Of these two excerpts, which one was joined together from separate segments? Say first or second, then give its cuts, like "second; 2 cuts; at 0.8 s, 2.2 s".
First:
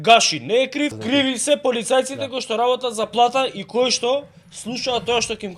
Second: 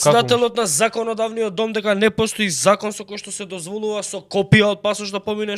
first; 1 cut; at 1.0 s